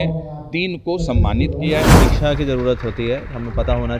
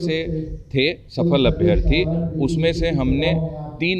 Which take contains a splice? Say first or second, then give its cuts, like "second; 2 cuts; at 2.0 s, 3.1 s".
first; 1 cut; at 2.0 s